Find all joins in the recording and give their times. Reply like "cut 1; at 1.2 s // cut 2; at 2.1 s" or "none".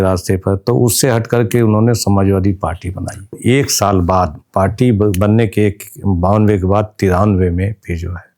cut 1; at 3.3 s